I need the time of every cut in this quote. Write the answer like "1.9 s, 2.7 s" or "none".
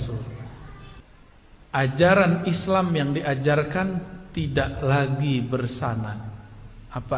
1.0 s